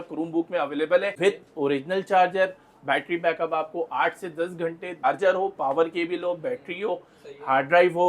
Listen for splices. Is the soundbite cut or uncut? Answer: cut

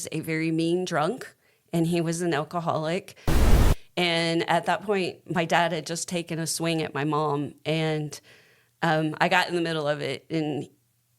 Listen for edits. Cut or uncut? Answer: cut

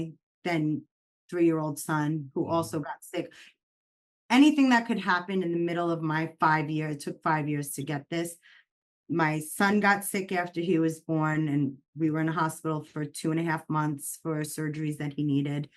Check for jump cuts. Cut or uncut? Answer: uncut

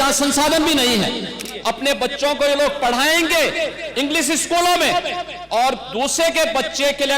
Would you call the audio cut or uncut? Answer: cut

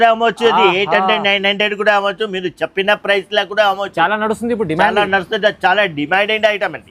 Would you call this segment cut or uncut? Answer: uncut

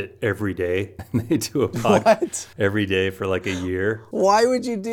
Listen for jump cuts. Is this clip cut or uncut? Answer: cut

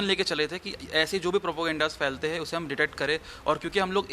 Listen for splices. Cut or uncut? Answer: uncut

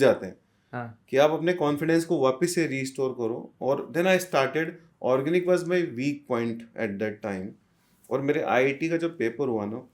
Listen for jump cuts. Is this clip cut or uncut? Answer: uncut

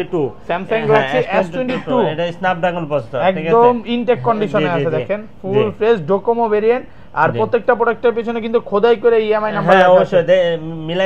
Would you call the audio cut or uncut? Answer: uncut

